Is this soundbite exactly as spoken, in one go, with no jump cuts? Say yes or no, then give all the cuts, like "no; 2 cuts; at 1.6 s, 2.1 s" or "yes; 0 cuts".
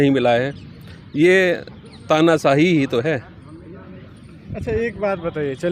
yes; 0 cuts